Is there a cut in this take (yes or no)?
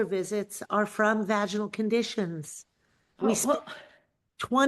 no